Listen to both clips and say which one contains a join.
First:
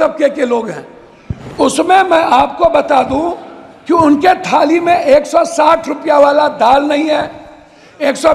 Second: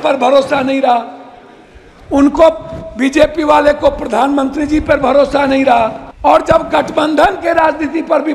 second; 1 cut; at 6.0 s

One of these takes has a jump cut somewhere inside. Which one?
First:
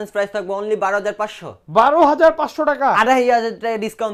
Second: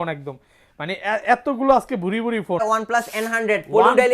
second; 1 cut; at 2.6 s

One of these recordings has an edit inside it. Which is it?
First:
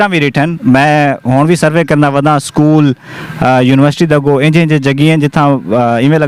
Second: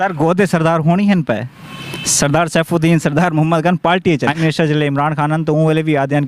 second; 1 cut; at 4.4 s

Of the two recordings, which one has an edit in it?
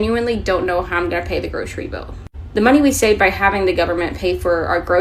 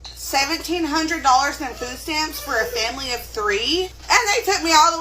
second; 1 cut; at 4.0 s

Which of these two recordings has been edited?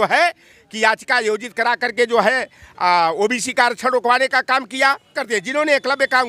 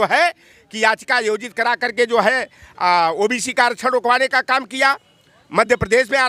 first; 1 cut; at 5.2 s

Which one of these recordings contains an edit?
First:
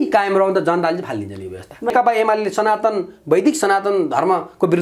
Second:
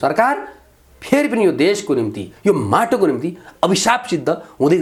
first; 1 cut; at 1.9 s

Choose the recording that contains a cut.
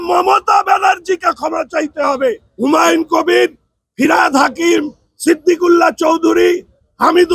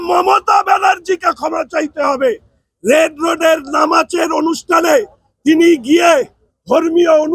first; 1 cut; at 2.5 s

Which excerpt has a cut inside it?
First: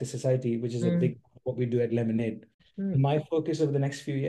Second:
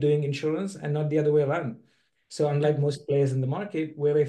first; 1 cut; at 2.6 s

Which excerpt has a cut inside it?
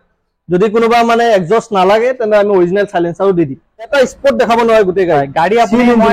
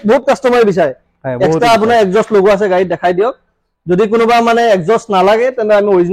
first; 1 cut; at 3.9 s

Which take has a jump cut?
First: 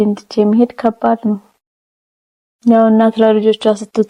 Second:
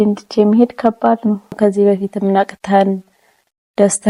second; 1 cut; at 1.6 s

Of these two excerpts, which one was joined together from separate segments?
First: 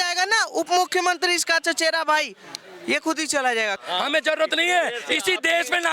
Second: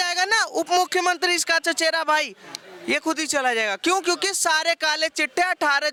first; 1 cut; at 3.8 s

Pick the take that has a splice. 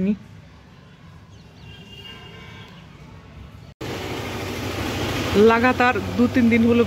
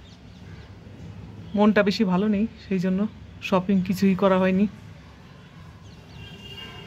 first; 1 cut; at 3.7 s

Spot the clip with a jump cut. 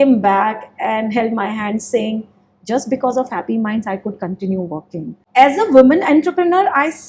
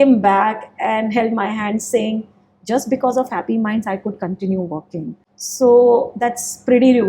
first; 1 cut; at 5.2 s

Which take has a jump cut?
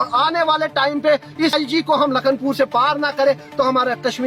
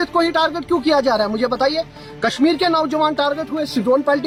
first; 1 cut; at 1.5 s

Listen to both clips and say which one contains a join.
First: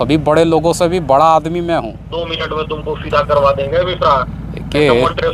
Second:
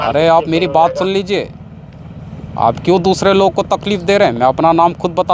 first; 1 cut; at 2.2 s

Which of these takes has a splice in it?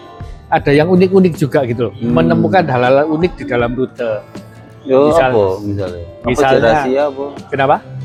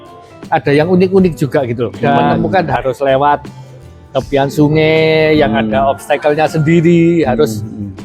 second; 1 cut; at 2.7 s

